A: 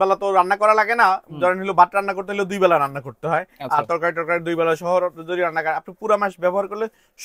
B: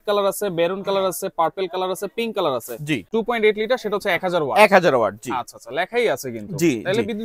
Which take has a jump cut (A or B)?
B